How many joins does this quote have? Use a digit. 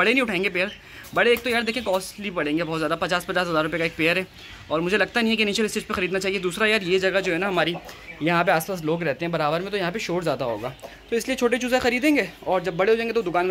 0